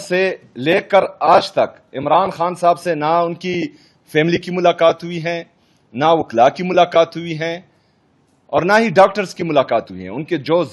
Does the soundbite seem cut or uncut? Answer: uncut